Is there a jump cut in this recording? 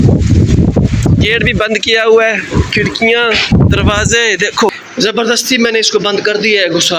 yes; 1 cut; at 4.7 s

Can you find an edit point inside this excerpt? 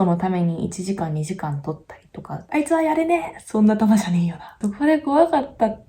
yes; 2 cuts; at 2.4 s, 4.6 s

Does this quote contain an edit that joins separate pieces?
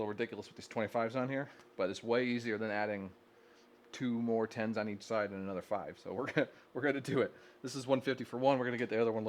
no; 0 cuts

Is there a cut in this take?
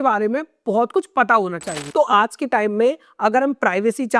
yes; 1 cut; at 1.7 s

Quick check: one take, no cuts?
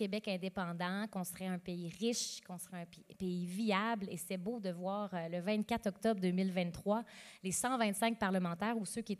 yes; 0 cuts

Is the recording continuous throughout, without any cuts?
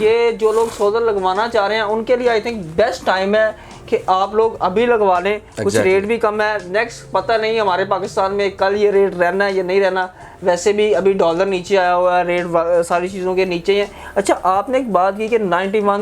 yes; 0 cuts

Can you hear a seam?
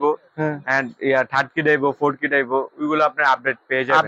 no; 0 cuts

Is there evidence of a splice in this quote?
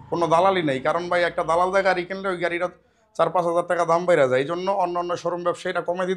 no; 0 cuts

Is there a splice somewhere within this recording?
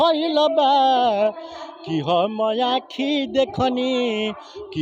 no; 0 cuts

